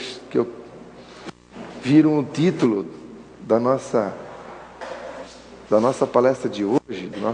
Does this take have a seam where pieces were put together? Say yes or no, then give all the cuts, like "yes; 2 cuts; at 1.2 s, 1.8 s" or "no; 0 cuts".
no; 0 cuts